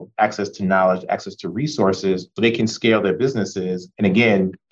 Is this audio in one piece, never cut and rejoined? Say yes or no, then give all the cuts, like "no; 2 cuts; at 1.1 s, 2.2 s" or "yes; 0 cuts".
no; 1 cut; at 3.8 s